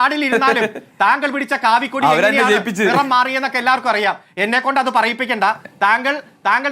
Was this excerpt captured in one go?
no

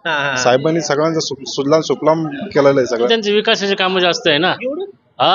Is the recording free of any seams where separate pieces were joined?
no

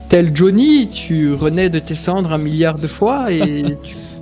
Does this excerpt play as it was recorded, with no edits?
yes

